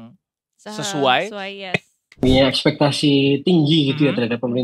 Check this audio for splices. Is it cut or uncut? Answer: cut